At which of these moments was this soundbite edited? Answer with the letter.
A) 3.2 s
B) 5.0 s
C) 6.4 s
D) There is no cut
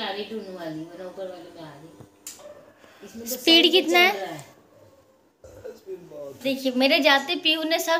C